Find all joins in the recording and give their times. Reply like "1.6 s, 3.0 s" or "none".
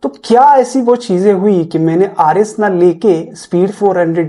none